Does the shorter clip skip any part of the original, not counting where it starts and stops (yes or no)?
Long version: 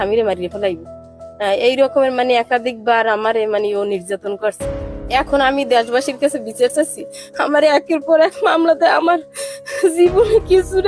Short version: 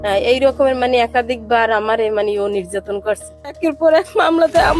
yes